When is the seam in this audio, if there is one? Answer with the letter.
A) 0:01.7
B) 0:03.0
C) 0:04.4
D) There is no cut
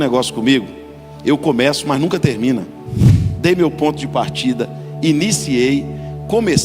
B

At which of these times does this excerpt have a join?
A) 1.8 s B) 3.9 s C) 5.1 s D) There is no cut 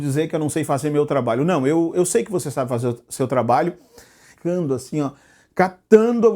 B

